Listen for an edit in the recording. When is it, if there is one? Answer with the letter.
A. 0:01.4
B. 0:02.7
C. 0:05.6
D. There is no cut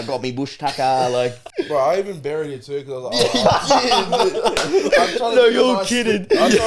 A